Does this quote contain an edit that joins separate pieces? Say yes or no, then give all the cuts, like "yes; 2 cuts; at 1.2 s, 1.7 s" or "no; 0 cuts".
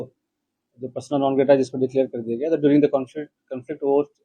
no; 0 cuts